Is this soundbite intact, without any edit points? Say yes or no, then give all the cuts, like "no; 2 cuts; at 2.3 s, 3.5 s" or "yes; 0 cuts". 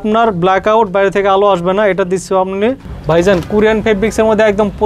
no; 1 cut; at 2.9 s